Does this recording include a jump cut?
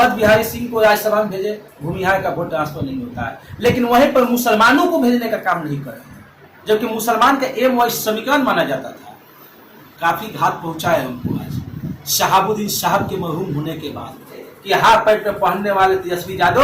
yes; 1 cut; at 14.5 s

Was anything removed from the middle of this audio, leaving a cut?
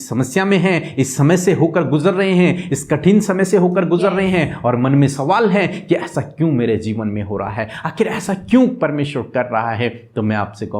no; 0 cuts

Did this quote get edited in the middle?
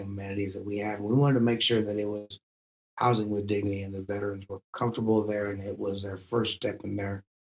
no; 0 cuts

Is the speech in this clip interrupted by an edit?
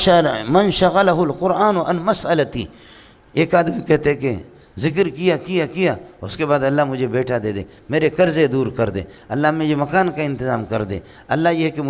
no; 0 cuts

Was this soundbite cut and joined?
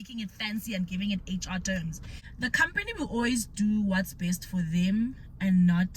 yes; 1 cut; at 1.7 s

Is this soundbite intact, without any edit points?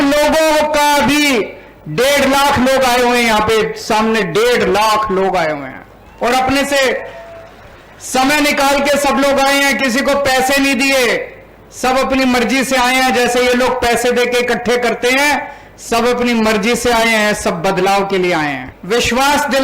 no; 1 cut; at 18.7 s

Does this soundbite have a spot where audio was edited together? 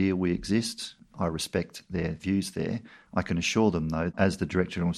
yes; 3 cuts; at 1.0 s, 3.0 s, 4.1 s

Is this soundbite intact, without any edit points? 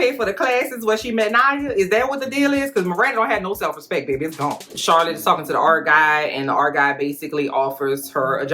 no; 1 cut; at 4.6 s

